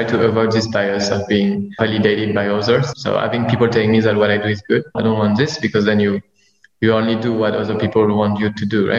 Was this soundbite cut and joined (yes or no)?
yes